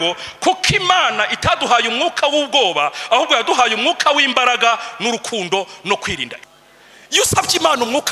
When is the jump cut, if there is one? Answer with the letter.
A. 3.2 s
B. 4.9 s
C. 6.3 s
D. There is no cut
C